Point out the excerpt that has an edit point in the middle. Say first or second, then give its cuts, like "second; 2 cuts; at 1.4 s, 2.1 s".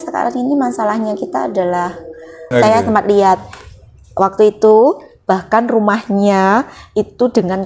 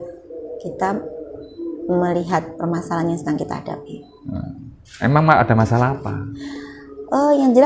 first; 1 cut; at 2.5 s